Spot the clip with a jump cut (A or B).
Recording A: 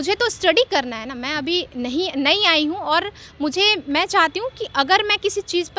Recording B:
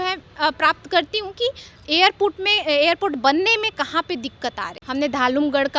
B